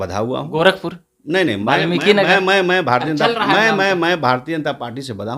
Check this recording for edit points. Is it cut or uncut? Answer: uncut